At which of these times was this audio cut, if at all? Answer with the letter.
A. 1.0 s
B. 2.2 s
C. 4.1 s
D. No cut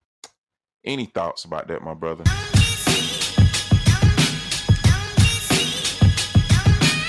B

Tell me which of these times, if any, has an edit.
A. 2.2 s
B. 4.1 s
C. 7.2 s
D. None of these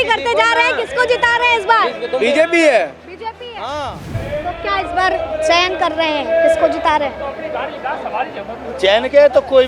B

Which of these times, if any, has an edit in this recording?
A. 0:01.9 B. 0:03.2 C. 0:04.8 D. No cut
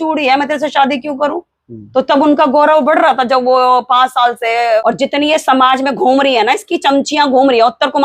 C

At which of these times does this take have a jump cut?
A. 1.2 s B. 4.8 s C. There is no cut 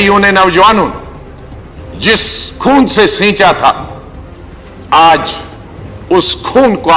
C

